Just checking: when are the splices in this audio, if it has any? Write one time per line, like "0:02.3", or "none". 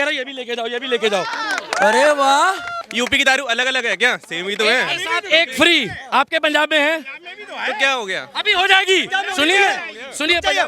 0:02.8